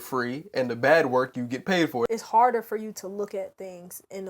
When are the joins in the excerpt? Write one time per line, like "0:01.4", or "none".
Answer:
0:02.1

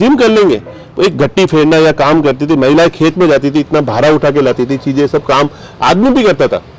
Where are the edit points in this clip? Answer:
none

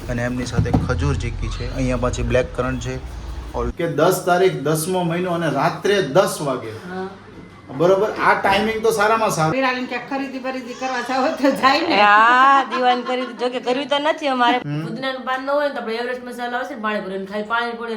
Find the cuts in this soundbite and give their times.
0:03.7
0:09.5
0:14.6

